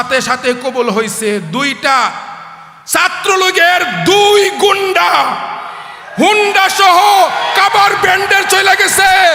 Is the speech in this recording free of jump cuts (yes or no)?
yes